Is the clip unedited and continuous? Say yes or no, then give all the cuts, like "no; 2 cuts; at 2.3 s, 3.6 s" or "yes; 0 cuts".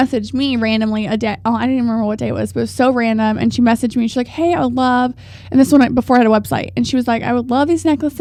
yes; 0 cuts